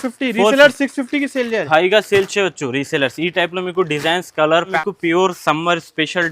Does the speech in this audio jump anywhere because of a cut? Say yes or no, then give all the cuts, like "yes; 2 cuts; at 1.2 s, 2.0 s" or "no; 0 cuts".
yes; 1 cut; at 4.7 s